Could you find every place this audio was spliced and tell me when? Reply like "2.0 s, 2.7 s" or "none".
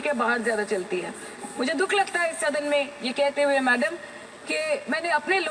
none